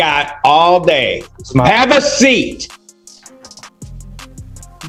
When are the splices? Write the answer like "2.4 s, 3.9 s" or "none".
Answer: none

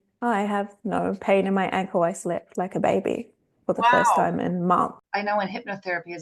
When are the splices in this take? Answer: 5.0 s

